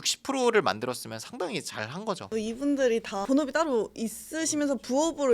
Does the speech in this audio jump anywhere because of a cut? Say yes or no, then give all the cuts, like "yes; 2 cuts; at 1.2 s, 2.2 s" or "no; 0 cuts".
no; 0 cuts